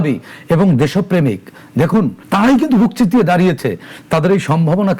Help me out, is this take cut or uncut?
cut